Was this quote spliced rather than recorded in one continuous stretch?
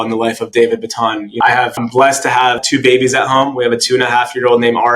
no; 0 cuts

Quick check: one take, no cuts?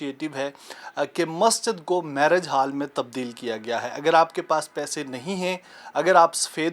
yes; 0 cuts

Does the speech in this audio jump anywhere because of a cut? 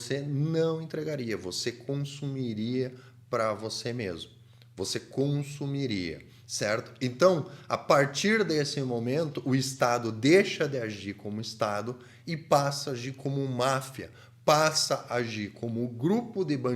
no; 0 cuts

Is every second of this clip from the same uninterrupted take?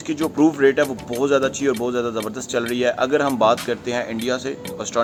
yes; 0 cuts

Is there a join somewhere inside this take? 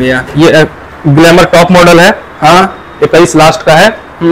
no; 0 cuts

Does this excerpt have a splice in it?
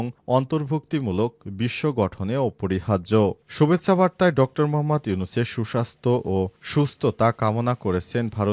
no; 0 cuts

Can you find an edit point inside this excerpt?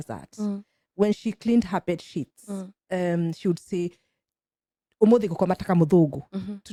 no; 0 cuts

